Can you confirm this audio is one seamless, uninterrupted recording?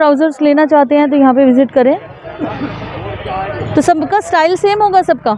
yes; 0 cuts

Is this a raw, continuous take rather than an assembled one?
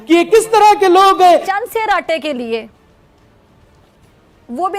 no; 1 cut; at 1.5 s

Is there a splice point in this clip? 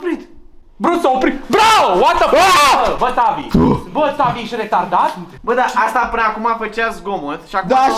no; 0 cuts

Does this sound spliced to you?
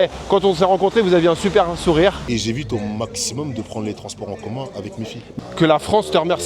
yes; 2 cuts; at 2.2 s, 5.4 s

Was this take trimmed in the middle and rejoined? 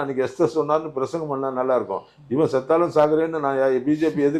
no; 0 cuts

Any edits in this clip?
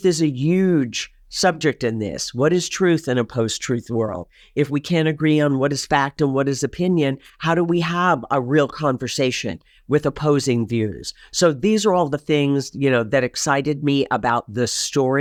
no; 0 cuts

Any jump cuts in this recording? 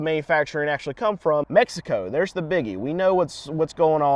yes; 1 cut; at 1.5 s

